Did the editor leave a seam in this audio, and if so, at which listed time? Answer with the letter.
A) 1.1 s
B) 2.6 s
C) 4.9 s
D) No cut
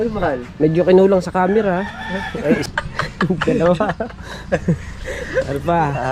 B